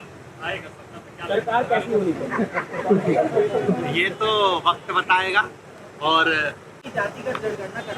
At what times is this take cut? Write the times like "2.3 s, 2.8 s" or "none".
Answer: 6.8 s